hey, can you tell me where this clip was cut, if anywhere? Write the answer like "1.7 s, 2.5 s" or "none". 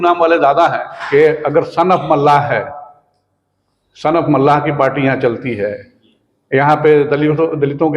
0.9 s